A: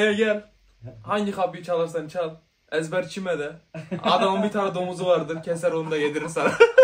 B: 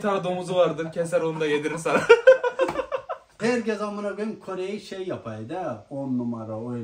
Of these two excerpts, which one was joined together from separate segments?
B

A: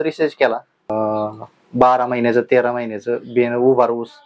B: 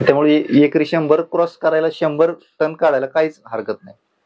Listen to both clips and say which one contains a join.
A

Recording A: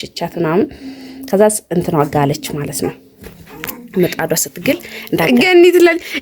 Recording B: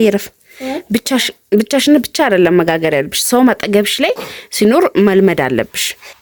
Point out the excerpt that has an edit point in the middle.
A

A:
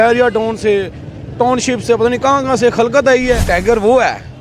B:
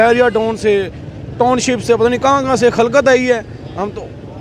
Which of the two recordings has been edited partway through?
A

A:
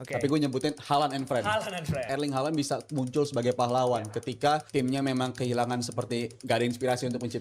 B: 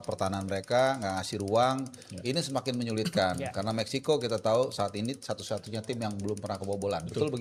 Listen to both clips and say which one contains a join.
A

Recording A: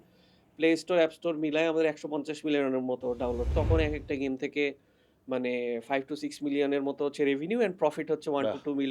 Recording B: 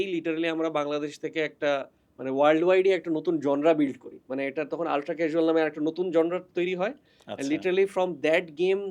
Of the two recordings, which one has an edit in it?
A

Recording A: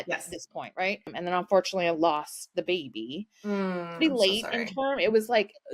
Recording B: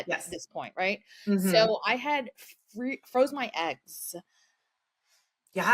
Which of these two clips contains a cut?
A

